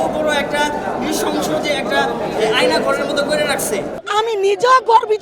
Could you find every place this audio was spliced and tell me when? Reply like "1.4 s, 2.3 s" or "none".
4.0 s